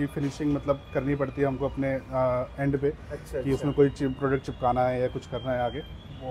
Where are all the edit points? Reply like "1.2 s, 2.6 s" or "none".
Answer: none